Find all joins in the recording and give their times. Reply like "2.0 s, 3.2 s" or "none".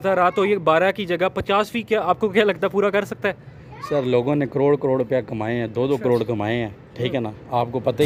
none